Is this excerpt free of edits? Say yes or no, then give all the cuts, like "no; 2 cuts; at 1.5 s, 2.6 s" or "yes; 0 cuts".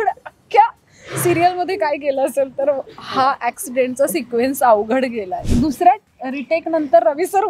no; 1 cut; at 5.3 s